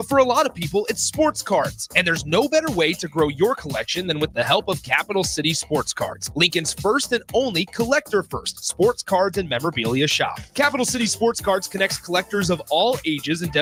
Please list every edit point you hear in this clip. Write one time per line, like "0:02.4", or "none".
none